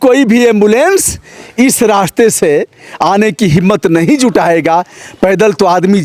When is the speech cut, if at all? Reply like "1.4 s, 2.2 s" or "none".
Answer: none